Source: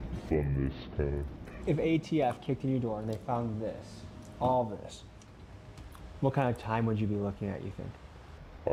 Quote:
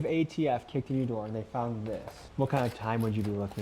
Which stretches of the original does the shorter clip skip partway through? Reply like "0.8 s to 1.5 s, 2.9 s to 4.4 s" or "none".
3.9 s to 6.0 s